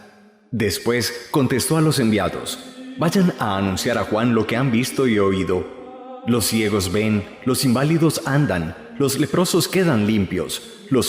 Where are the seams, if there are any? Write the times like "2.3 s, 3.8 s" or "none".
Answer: 9.2 s